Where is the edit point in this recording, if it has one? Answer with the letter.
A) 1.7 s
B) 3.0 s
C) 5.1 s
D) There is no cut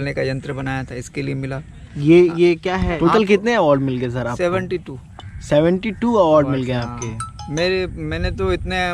B